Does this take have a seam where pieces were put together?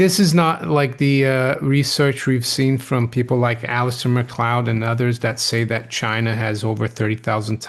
no; 0 cuts

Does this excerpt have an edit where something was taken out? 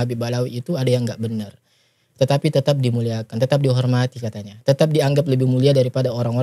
no; 0 cuts

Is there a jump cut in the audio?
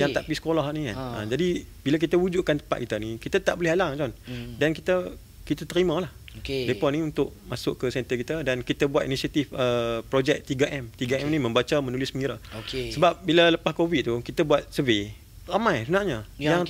no; 0 cuts

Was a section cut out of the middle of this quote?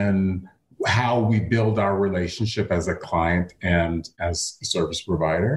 yes; 1 cut; at 4.1 s

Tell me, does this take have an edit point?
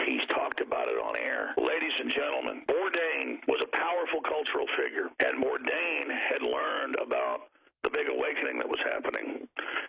yes; 4 cuts; at 1.5 s, 2.6 s, 3.4 s, 5.1 s

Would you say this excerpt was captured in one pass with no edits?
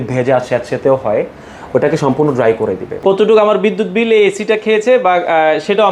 no; 1 cut; at 2.9 s

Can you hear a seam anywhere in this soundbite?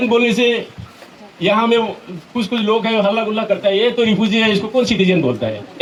no; 0 cuts

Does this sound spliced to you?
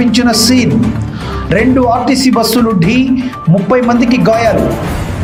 no; 0 cuts

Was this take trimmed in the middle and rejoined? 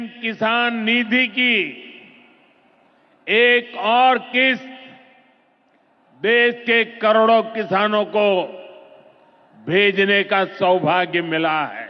no; 0 cuts

